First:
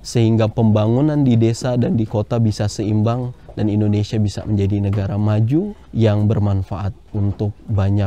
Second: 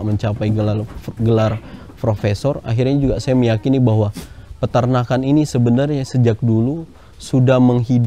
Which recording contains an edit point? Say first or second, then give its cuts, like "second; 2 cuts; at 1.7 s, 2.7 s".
first; 1 cut; at 5.8 s